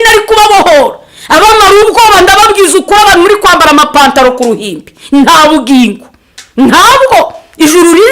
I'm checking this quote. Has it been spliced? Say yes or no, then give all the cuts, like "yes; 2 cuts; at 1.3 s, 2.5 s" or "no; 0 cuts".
no; 0 cuts